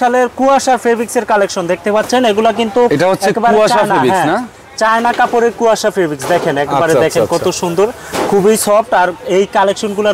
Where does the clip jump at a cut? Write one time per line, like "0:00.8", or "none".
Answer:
none